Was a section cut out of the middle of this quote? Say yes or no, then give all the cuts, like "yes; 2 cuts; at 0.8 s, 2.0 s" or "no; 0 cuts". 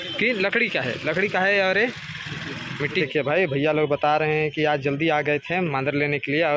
yes; 1 cut; at 3.0 s